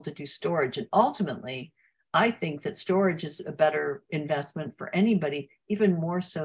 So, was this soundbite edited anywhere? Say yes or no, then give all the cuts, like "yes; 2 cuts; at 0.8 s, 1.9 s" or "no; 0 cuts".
no; 0 cuts